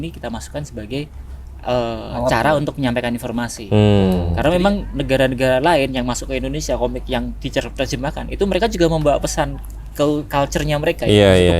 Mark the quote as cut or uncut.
cut